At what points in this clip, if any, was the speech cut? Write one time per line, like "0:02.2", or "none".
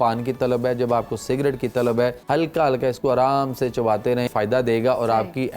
0:02.2
0:04.3

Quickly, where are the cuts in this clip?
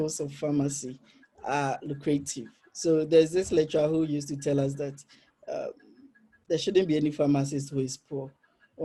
none

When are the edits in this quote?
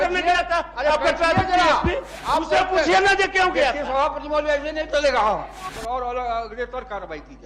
0:02.1
0:05.6

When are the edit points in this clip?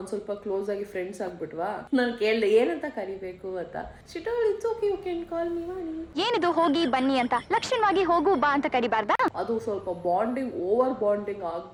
none

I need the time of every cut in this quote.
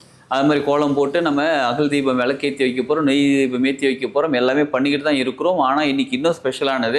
none

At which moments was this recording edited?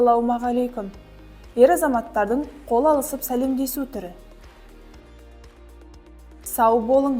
none

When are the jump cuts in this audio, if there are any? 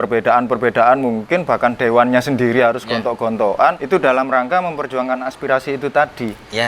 0:03.8

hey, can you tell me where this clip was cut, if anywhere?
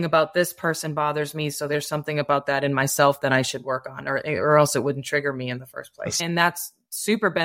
0:06.2

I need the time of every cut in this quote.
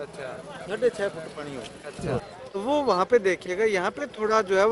0:02.3

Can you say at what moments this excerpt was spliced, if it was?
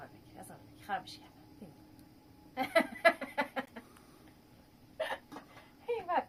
none

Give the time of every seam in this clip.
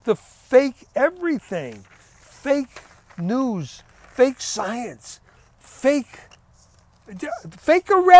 none

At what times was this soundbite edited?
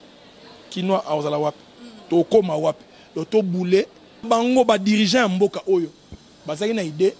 0:04.2

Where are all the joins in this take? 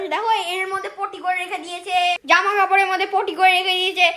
0:02.2

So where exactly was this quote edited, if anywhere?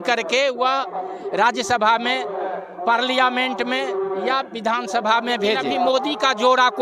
0:05.8

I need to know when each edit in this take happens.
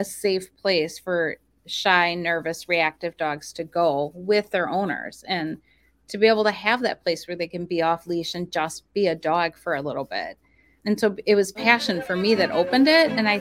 0:10.8

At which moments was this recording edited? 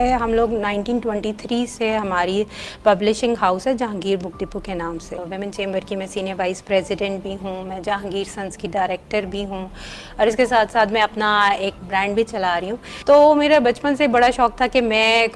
0:05.2
0:11.8
0:12.9

